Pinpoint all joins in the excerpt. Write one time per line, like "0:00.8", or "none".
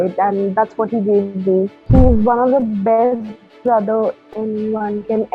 0:01.8